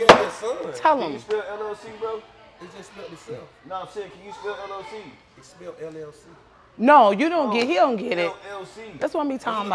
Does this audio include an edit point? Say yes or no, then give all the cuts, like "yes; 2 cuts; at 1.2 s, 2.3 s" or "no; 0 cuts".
no; 0 cuts